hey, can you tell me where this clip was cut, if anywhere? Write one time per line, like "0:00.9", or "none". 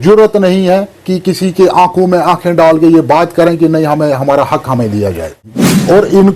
0:05.3